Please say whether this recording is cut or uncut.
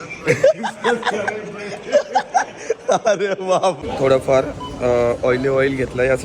cut